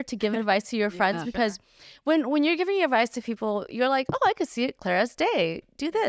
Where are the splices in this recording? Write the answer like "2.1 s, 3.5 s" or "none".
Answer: none